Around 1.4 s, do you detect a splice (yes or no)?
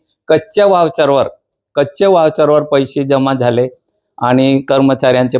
no